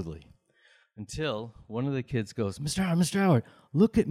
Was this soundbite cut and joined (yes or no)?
no